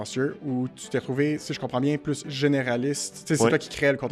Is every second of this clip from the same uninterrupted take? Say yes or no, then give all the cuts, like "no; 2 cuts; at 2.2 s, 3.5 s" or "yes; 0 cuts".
yes; 0 cuts